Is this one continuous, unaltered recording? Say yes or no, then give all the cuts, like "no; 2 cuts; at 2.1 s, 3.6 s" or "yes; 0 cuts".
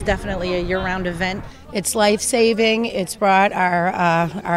no; 1 cut; at 1.5 s